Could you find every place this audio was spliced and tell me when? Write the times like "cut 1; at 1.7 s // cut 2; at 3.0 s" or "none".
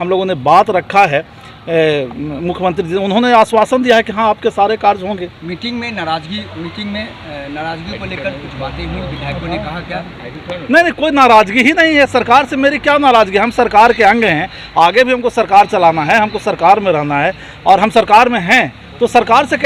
none